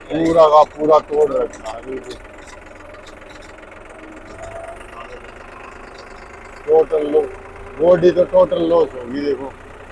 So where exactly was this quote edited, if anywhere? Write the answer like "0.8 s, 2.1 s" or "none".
none